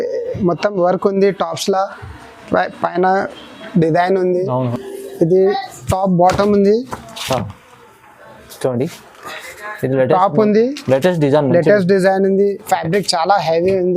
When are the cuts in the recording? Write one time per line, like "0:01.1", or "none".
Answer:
0:04.7